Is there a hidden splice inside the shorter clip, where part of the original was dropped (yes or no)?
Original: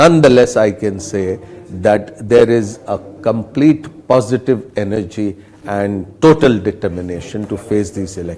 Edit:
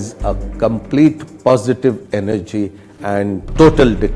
no